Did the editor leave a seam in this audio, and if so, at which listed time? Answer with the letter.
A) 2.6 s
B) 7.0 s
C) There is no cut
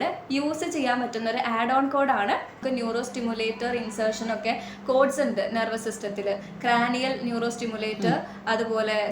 A